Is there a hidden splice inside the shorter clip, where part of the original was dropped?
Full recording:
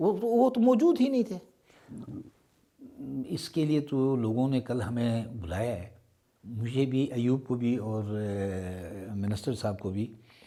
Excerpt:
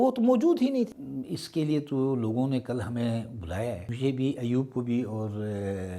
yes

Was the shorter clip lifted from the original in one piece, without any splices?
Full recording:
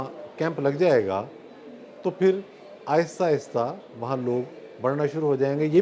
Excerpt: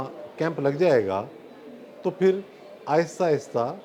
yes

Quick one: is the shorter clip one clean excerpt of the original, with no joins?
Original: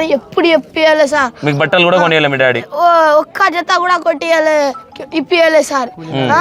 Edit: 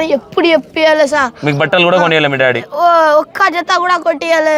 yes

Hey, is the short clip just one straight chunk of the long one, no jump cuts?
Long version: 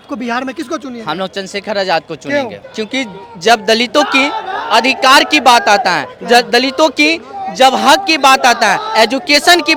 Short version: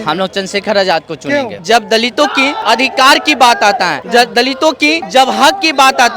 no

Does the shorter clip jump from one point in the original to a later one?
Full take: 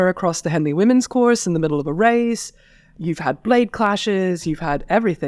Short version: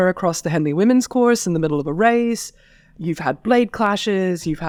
no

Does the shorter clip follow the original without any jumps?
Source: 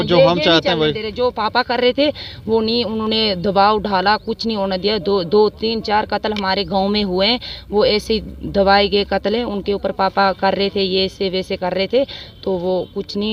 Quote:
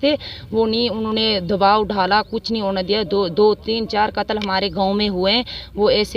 yes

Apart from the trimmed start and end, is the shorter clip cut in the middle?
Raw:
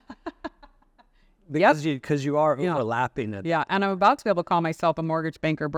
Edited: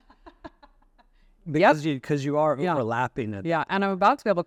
no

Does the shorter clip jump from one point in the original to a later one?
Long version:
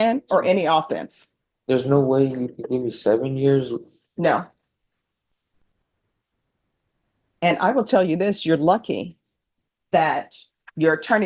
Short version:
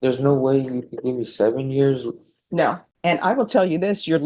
yes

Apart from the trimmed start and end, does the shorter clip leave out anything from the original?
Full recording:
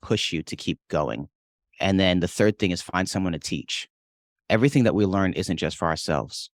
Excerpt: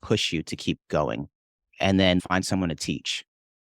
yes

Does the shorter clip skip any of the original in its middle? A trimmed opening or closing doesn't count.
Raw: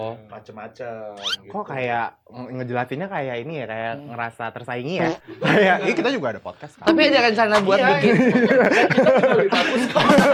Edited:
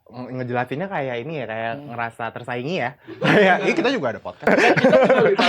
yes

